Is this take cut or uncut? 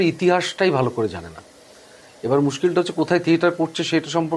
uncut